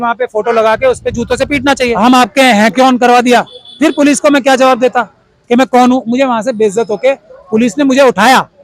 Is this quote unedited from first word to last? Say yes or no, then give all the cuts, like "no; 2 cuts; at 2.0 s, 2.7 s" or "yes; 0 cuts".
no; 1 cut; at 1.9 s